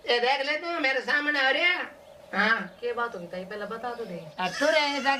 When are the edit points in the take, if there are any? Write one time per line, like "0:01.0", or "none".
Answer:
0:04.2